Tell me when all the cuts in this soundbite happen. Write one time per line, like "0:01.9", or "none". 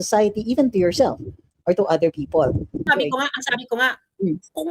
0:02.9